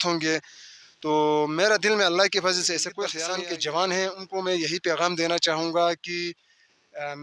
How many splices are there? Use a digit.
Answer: 1